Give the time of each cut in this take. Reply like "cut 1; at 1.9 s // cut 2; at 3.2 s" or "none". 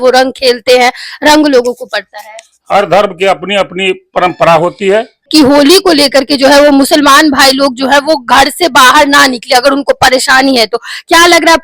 cut 1; at 5.3 s